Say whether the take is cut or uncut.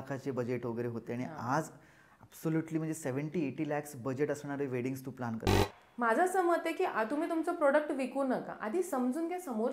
cut